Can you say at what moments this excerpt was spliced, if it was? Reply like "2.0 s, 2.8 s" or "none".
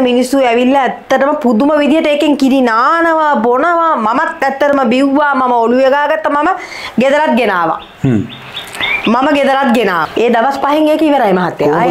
10.0 s